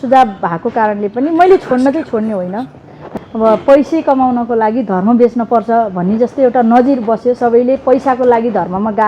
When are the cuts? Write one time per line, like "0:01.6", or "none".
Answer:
0:03.0